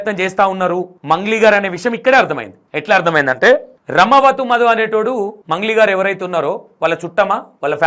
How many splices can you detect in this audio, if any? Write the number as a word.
zero